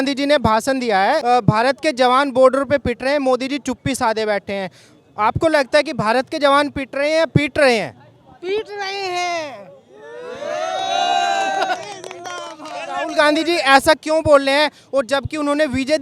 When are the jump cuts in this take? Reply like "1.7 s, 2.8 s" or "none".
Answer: 1.2 s

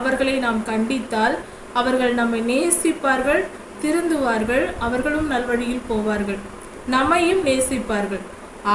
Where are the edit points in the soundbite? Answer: none

